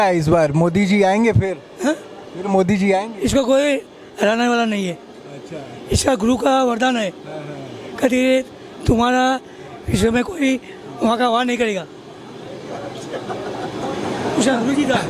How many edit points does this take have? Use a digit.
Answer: 0